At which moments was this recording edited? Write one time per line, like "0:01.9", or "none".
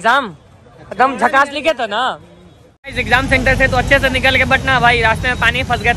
0:02.9